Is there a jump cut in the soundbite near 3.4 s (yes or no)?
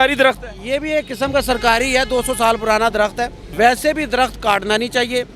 yes